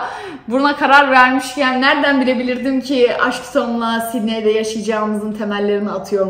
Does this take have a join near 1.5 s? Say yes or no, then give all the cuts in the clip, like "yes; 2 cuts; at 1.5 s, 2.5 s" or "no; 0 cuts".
no; 0 cuts